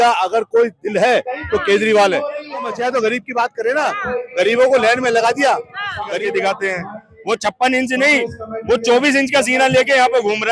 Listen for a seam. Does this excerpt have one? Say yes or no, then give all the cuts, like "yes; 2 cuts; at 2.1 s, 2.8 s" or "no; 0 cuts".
yes; 2 cuts; at 2.7 s, 6.2 s